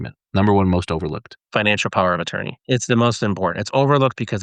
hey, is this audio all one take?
no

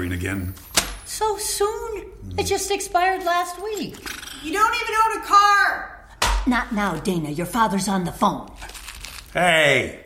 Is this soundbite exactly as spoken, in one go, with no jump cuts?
yes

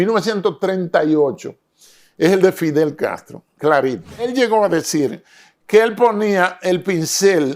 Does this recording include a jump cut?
yes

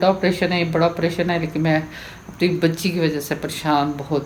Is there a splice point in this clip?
no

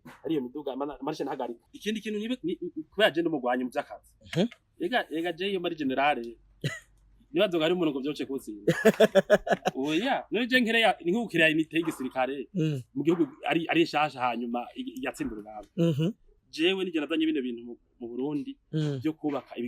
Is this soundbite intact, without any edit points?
no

